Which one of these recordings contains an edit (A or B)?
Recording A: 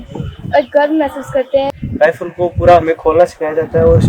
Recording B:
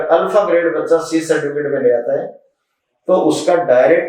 A